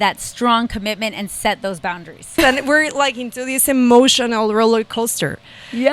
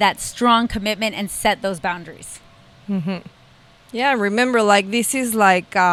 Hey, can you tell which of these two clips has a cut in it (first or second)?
first